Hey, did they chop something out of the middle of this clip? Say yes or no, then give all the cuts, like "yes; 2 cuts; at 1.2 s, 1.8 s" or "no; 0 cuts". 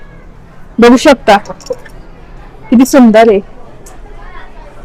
no; 0 cuts